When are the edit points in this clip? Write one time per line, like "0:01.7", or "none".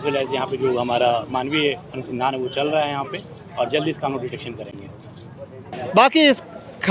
none